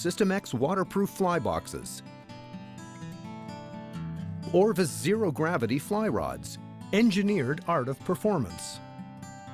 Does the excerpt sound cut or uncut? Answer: cut